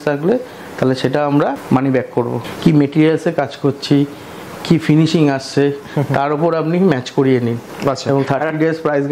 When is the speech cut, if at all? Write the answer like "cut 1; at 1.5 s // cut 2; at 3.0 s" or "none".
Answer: cut 1; at 1.6 s // cut 2; at 2.4 s